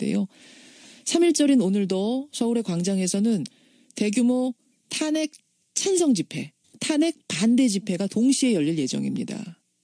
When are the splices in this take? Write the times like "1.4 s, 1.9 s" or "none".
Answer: 2.3 s